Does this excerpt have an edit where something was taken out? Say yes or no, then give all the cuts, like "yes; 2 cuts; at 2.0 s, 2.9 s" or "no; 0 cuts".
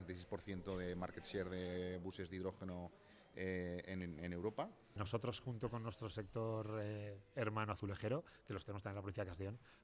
yes; 1 cut; at 5.0 s